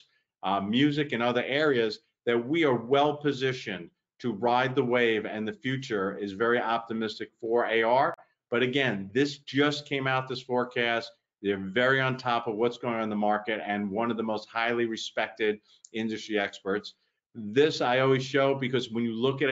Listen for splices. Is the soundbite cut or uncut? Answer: uncut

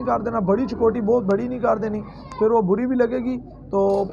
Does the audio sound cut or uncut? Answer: uncut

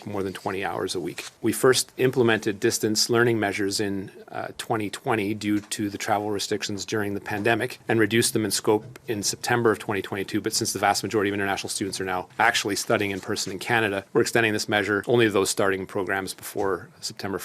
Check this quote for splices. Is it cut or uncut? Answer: uncut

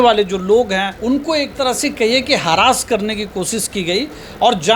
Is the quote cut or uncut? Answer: cut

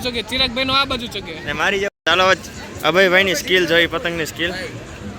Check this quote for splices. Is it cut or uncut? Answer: cut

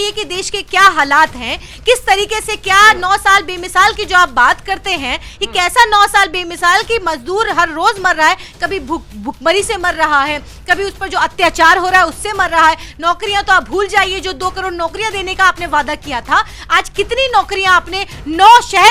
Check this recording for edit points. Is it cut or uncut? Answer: uncut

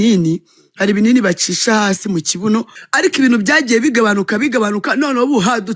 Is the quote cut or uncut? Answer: cut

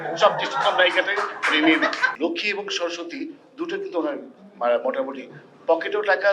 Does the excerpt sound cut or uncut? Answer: cut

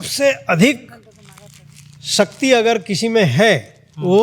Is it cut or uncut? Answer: uncut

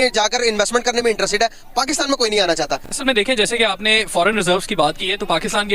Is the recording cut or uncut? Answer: uncut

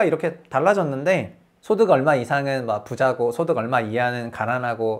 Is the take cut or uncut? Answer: uncut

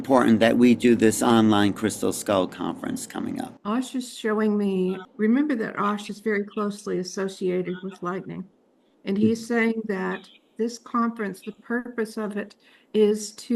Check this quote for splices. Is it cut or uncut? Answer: cut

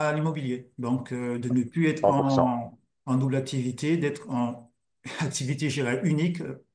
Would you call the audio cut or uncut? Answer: uncut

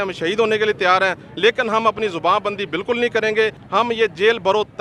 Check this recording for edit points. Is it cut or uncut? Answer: cut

